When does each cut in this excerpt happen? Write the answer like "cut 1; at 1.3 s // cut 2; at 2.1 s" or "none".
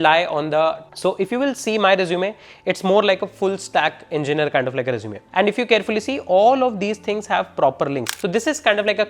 cut 1; at 0.8 s // cut 2; at 5.2 s // cut 3; at 8.1 s